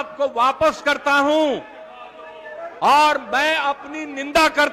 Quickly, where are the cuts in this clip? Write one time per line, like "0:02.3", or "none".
none